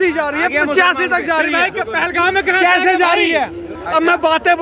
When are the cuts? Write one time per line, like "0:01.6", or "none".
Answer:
0:03.7